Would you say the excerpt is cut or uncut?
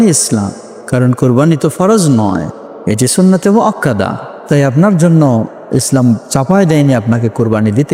uncut